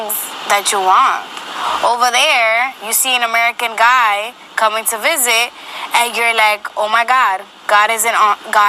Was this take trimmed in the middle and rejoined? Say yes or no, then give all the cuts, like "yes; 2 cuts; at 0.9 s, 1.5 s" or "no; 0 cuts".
no; 0 cuts